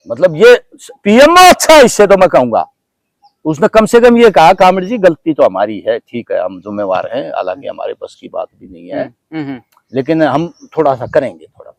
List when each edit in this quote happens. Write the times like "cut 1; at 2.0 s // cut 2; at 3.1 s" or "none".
none